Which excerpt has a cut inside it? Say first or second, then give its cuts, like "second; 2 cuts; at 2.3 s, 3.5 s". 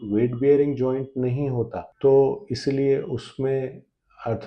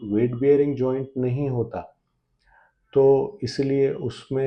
first; 1 cut; at 1.8 s